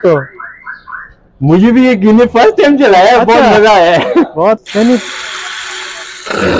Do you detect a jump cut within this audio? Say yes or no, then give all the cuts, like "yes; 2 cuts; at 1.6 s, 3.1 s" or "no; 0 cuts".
yes; 1 cut; at 4.6 s